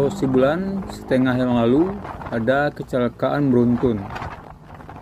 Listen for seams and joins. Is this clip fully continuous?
yes; 0 cuts

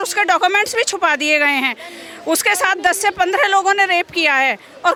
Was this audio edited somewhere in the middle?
no; 0 cuts

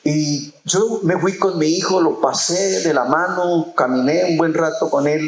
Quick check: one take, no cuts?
yes; 0 cuts

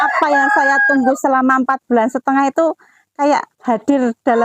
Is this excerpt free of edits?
yes; 0 cuts

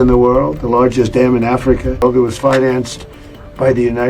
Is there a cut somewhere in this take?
yes; 1 cut; at 2.0 s

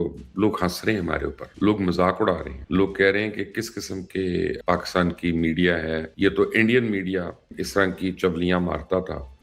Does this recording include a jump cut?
yes; 4 cuts; at 1.4 s, 2.5 s, 4.6 s, 6.1 s

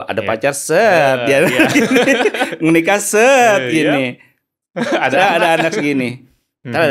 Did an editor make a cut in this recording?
no; 0 cuts

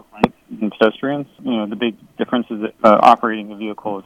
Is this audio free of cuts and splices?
no; 2 cuts; at 1.4 s, 2.7 s

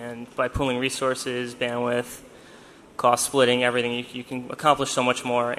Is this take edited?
yes; 1 cut; at 3.6 s

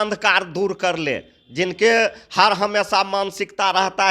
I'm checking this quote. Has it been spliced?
no; 0 cuts

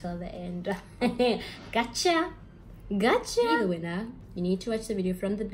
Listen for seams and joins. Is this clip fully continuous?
no; 1 cut; at 3.5 s

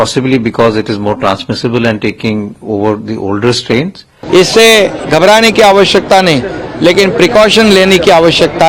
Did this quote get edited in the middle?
yes; 1 cut; at 4.1 s

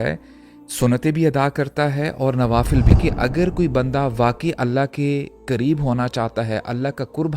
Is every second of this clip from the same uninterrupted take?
no; 1 cut; at 2.9 s

